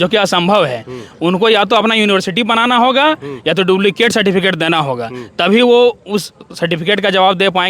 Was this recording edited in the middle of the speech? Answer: no; 0 cuts

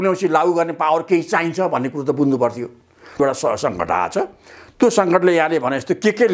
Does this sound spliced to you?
yes; 1 cut; at 3.2 s

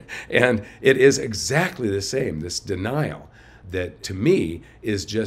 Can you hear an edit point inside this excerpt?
yes; 1 cut; at 3.7 s

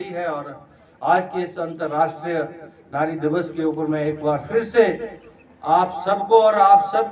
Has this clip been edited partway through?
no; 0 cuts

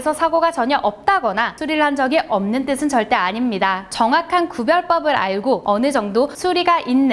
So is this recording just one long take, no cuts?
no; 3 cuts; at 1.6 s, 3.9 s, 5.6 s

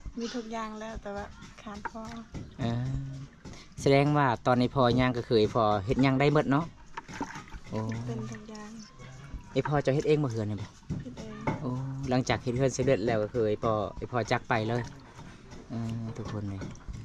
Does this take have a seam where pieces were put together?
no; 0 cuts

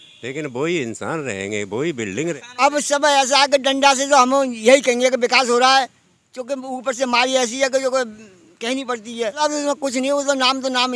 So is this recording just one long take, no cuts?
no; 2 cuts; at 2.2 s, 9.4 s

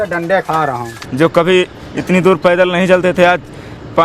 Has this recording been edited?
yes; 1 cut; at 0.9 s

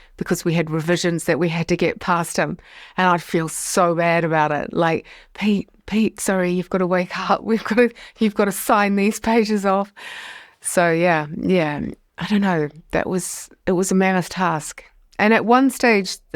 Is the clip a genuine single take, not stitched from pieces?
yes; 0 cuts

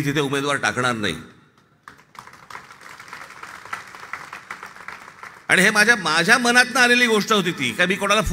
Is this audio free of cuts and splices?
yes; 0 cuts

